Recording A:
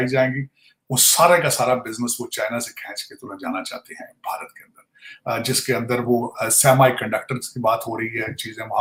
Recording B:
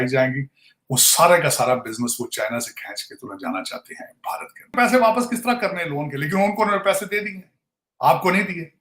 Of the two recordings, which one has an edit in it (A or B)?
B